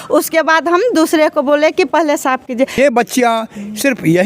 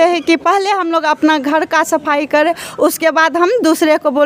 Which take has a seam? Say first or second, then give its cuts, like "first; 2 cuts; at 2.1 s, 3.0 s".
first; 1 cut; at 2.8 s